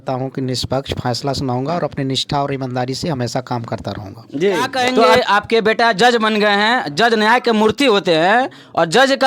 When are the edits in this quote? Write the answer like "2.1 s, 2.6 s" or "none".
4.9 s

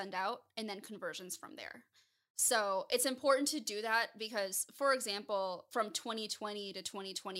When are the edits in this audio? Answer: 5.6 s

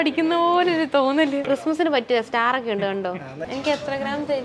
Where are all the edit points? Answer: 1.4 s, 3.4 s

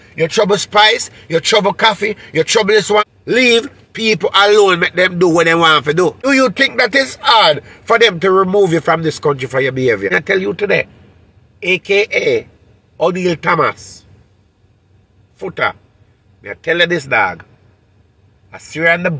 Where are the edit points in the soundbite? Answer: 3.1 s, 6.3 s, 10.1 s

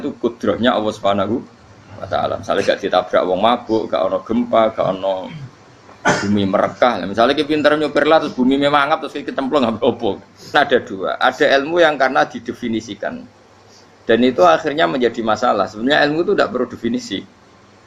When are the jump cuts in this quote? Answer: 10.5 s

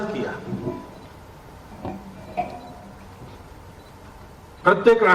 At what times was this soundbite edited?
none

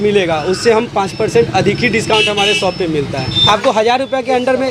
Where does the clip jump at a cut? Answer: 3.3 s

